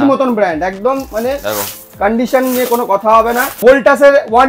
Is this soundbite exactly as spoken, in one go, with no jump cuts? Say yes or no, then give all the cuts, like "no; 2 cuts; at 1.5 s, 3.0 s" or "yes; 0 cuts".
no; 1 cut; at 3.6 s